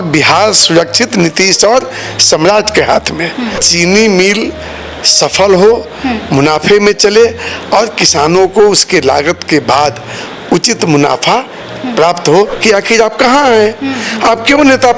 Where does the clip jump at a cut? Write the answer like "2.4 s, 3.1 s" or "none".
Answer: 3.6 s, 12.5 s